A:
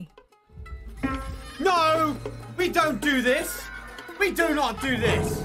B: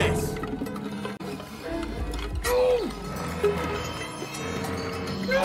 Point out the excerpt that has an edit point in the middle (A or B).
B